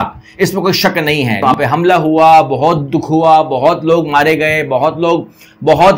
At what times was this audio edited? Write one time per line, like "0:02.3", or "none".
0:01.4